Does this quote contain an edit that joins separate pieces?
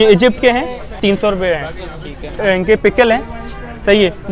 yes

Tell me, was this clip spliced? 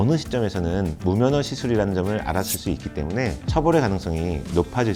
no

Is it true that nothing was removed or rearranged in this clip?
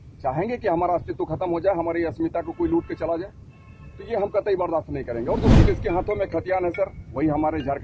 no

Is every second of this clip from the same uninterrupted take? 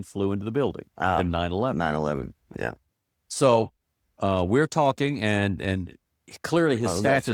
yes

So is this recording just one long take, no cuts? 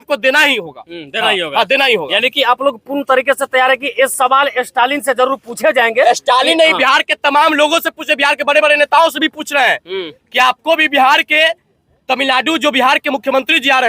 yes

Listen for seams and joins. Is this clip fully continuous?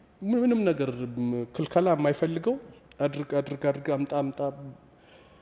yes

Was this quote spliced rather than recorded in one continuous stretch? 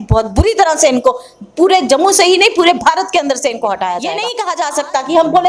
yes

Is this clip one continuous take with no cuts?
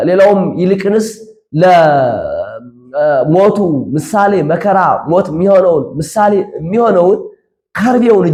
yes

